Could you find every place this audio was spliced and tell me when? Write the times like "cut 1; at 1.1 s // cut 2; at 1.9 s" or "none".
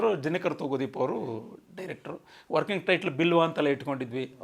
none